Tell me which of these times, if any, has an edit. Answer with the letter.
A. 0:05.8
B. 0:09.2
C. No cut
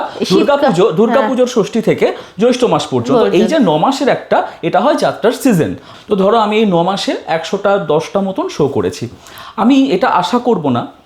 A